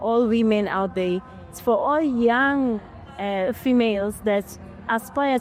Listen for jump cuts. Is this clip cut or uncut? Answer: uncut